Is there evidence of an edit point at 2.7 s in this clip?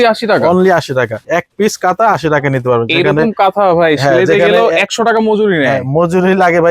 no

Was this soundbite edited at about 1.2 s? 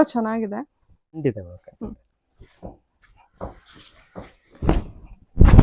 yes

